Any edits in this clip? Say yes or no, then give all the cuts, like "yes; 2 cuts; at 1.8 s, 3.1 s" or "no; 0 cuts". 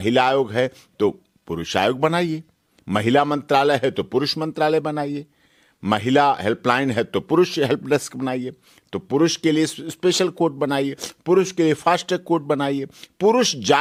no; 0 cuts